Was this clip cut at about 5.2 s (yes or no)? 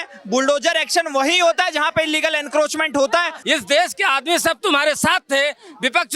no